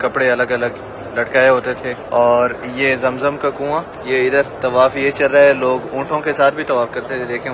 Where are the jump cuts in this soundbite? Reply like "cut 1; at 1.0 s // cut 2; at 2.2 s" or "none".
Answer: none